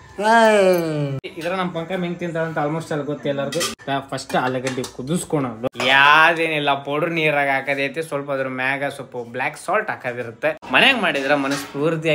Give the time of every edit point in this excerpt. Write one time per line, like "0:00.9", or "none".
0:01.3
0:03.8
0:05.6
0:10.6